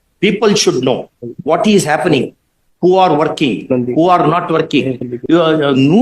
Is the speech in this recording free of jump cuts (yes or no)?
no